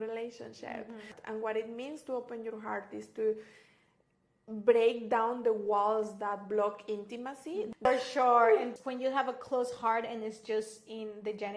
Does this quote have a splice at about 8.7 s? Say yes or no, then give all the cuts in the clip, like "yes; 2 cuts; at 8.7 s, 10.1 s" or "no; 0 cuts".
yes; 3 cuts; at 1.1 s, 7.8 s, 8.7 s